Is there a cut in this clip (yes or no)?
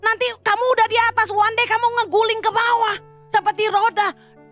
no